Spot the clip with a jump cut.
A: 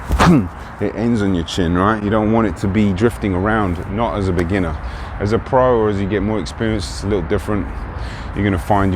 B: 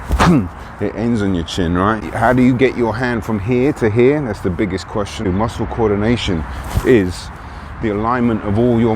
B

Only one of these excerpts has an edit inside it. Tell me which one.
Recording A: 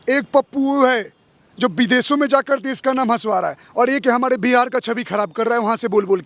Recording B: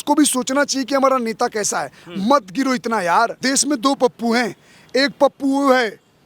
B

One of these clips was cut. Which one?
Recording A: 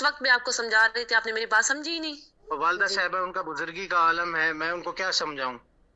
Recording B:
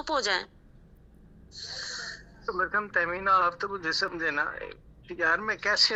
A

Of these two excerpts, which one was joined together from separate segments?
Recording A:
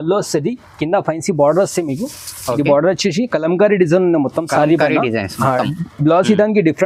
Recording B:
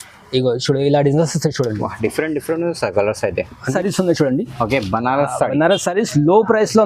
B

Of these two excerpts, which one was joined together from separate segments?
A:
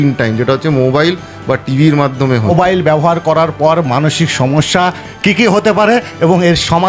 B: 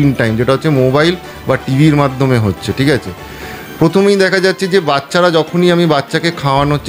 A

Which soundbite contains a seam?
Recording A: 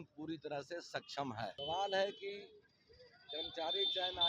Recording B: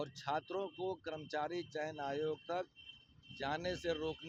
A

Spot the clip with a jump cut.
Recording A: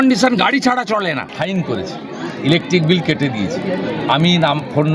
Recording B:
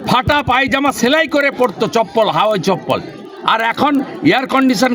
A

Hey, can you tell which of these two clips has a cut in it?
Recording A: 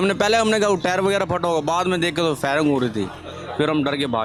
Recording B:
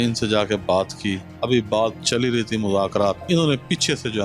B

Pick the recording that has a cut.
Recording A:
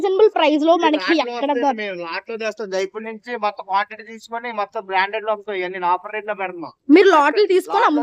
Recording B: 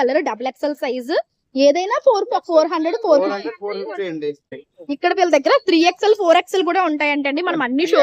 B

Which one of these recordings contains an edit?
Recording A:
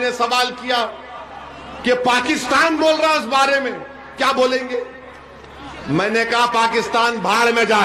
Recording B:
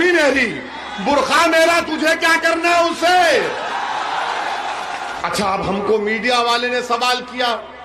B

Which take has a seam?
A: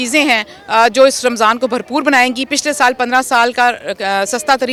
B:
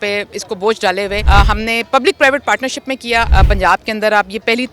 B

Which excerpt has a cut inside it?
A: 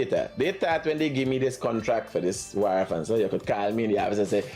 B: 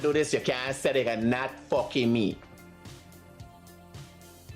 B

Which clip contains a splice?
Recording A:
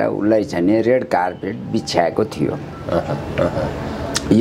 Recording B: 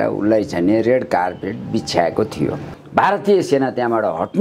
B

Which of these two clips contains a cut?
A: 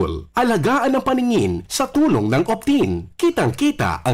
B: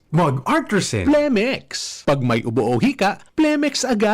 B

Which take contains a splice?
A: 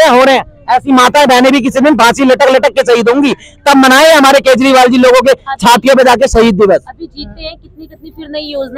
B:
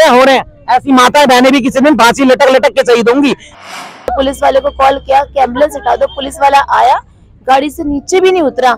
B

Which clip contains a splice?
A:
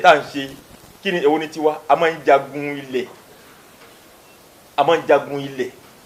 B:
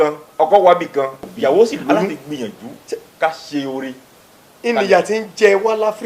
B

